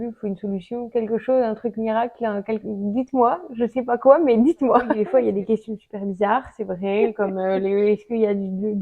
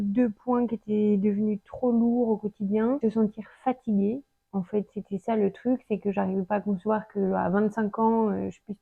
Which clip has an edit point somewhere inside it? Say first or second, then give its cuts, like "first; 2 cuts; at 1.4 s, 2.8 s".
first; 1 cut; at 5.0 s